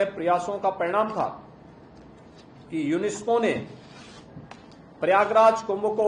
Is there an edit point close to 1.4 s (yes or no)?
no